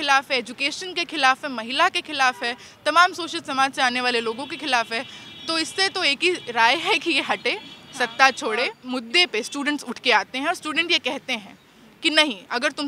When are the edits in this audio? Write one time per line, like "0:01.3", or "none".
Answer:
0:08.8